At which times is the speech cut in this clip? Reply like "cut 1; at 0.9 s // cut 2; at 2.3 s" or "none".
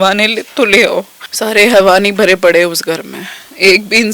cut 1; at 1.2 s